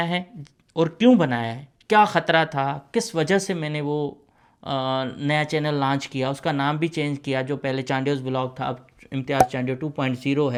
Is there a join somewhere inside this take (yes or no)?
no